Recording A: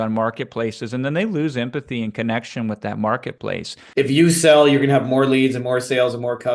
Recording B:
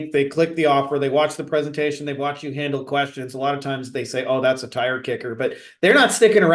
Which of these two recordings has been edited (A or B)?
A